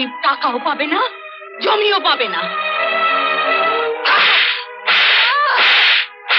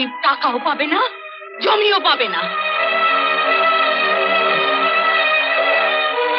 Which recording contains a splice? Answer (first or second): first